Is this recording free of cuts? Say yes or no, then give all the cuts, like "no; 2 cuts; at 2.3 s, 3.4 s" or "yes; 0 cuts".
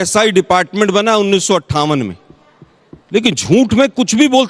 yes; 0 cuts